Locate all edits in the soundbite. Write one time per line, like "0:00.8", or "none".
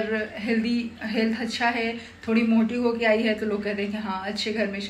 none